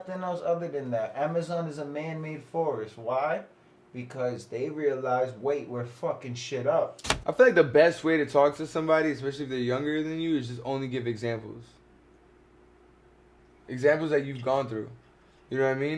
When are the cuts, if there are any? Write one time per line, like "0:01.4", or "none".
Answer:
0:07.1